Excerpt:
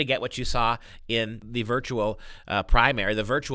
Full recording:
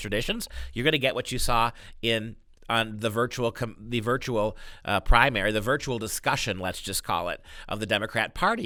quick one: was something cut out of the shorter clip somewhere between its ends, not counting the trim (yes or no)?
yes